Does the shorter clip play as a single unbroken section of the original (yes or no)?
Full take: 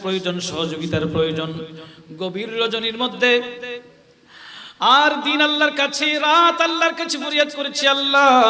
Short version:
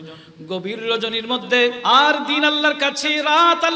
no